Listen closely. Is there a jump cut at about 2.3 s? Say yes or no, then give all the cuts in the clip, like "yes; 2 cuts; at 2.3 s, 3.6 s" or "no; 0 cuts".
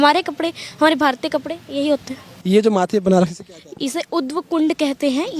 yes; 1 cut; at 2.3 s